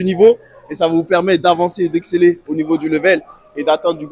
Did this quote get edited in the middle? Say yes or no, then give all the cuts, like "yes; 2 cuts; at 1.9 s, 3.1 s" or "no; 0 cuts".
no; 0 cuts